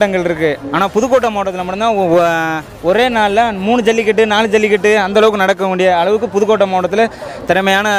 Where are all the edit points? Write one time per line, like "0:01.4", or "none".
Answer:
none